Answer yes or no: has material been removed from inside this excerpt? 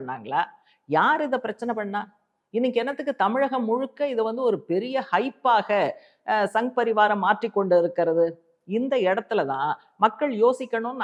no